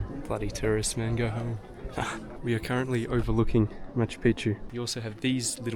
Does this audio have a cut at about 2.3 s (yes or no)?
yes